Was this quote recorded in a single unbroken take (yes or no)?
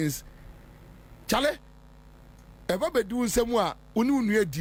yes